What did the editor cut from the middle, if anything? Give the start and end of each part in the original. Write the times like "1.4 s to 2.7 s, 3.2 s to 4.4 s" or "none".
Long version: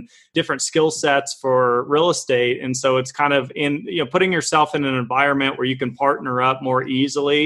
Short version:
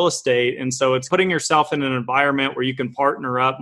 3.1 s to 4.1 s